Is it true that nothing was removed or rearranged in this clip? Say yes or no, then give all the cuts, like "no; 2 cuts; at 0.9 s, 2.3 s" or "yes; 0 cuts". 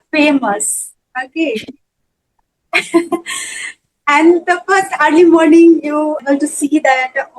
no; 1 cut; at 6.2 s